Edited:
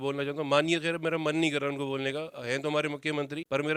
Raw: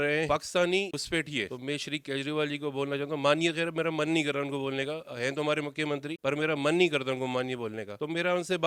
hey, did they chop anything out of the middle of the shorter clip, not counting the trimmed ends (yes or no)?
no